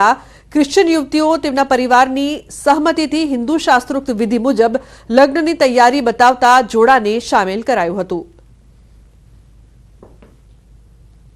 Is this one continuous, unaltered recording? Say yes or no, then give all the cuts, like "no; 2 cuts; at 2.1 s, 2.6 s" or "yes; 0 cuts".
no; 1 cut; at 3.4 s